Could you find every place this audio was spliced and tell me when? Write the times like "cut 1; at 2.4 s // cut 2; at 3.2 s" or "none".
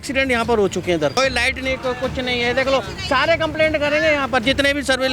cut 1; at 1.2 s